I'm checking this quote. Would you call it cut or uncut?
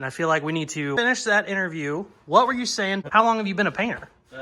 cut